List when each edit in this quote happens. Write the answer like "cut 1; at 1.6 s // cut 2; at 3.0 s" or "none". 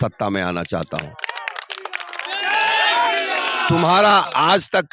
none